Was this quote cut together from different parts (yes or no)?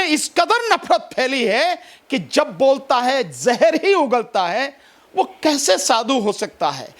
no